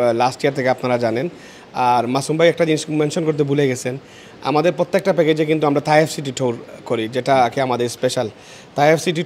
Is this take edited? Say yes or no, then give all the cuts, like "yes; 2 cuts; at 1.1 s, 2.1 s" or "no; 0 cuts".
no; 0 cuts